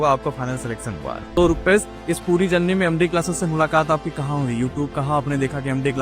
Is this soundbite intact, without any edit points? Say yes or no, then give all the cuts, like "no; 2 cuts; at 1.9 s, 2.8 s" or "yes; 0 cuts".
no; 1 cut; at 1.4 s